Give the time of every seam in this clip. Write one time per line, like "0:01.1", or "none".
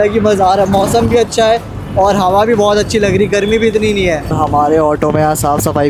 none